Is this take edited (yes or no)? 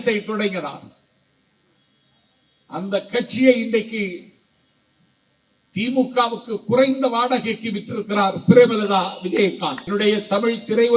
yes